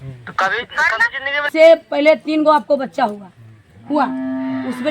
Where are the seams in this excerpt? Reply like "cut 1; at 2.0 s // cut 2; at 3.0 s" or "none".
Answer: cut 1; at 1.5 s